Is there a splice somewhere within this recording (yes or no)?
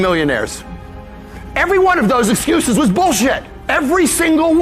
yes